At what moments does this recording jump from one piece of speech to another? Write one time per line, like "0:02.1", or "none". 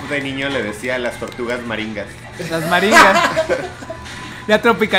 none